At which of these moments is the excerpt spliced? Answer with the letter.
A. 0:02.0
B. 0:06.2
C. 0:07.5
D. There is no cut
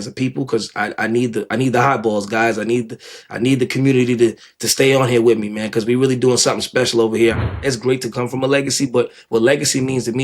C